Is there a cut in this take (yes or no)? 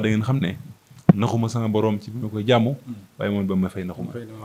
no